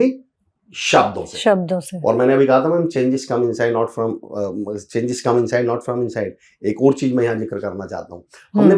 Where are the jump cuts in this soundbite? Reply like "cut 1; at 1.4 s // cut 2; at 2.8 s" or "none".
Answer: none